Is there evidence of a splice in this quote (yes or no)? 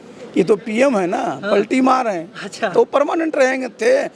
no